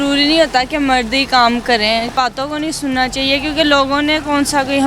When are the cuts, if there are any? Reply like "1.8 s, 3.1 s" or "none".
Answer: 2.1 s